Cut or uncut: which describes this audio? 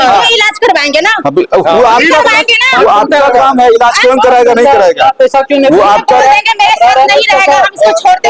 uncut